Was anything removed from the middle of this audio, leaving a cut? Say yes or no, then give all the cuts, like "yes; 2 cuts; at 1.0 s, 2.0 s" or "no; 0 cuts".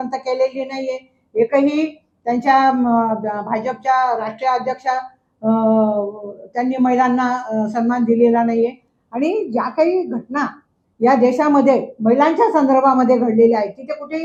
no; 0 cuts